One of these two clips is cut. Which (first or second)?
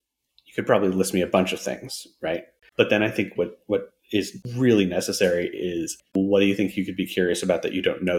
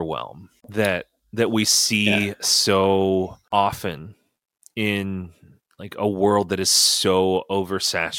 first